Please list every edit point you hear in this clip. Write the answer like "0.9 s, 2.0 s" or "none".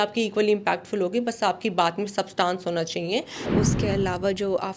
3.5 s